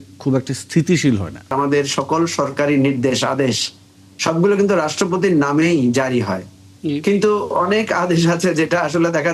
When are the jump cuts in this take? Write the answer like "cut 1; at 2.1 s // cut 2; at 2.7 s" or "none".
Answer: cut 1; at 1.5 s